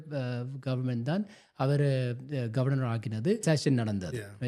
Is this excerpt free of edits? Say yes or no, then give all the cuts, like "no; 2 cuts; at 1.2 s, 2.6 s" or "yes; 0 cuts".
no; 1 cut; at 3.4 s